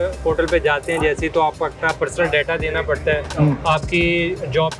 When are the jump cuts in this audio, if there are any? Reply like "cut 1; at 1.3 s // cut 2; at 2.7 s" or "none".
none